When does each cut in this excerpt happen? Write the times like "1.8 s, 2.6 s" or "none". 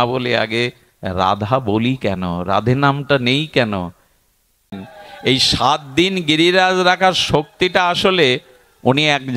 4.7 s